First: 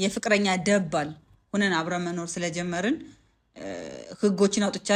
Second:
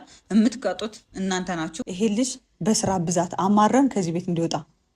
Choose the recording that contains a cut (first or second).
second